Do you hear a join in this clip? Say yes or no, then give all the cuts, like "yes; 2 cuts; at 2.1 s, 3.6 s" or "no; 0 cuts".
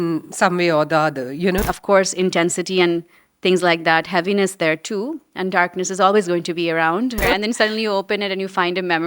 yes; 2 cuts; at 1.7 s, 7.2 s